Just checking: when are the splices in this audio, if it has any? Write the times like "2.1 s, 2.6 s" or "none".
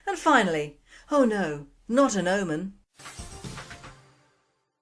3.7 s